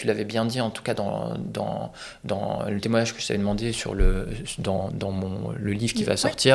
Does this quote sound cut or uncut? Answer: uncut